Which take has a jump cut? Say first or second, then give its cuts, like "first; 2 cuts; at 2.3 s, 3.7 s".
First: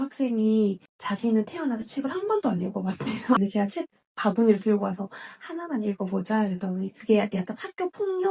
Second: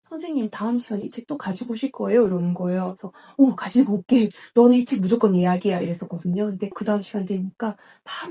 first; 3 cuts; at 0.9 s, 3.4 s, 6.9 s